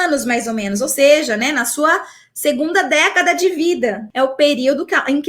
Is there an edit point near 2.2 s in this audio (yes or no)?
no